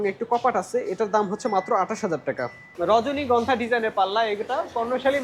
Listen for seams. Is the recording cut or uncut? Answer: cut